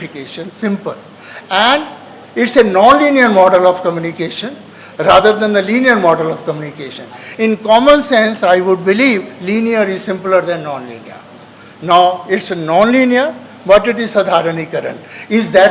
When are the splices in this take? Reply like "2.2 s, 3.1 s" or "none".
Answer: none